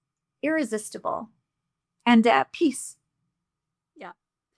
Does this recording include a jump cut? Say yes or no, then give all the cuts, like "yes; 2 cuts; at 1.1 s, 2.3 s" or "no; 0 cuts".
no; 0 cuts